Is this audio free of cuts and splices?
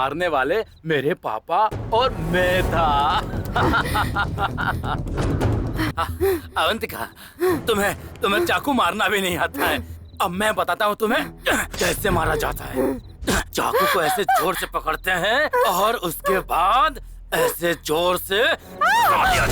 no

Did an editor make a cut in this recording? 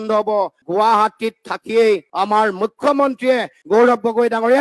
no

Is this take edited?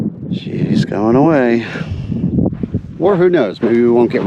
yes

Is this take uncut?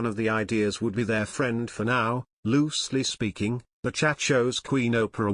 yes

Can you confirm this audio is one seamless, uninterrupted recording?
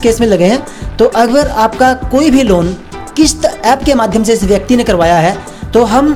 yes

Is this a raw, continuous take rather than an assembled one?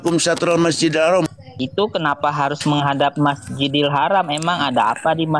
no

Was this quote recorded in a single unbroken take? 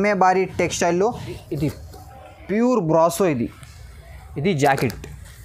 no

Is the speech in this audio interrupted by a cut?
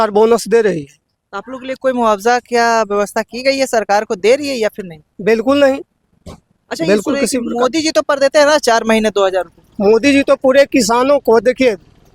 no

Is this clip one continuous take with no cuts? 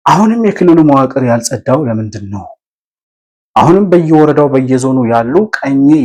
yes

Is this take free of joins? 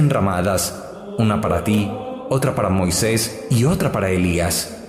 no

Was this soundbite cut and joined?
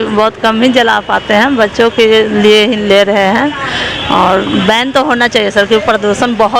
no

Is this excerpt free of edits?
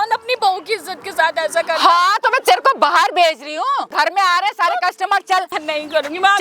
no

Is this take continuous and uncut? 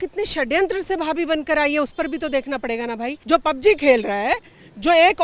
no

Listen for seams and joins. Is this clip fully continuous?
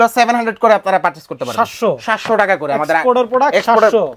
yes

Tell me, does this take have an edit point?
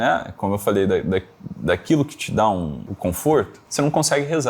yes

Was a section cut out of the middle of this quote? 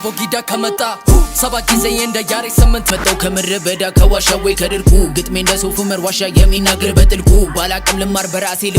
yes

